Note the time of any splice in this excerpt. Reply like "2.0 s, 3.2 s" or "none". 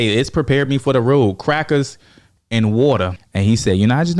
3.2 s